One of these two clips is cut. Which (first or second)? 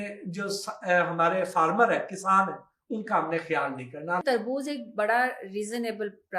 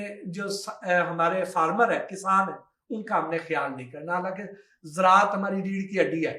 first